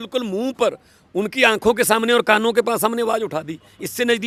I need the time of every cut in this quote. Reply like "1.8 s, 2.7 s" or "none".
none